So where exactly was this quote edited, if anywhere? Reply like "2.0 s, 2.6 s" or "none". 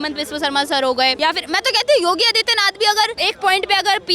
1.1 s, 3.2 s